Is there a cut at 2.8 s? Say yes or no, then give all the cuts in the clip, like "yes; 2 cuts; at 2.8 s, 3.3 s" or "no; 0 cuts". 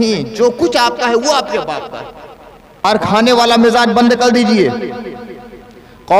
yes; 1 cut; at 2.8 s